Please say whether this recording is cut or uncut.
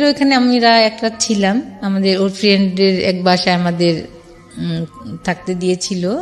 uncut